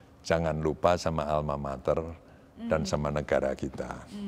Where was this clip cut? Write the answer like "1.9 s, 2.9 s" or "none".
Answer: none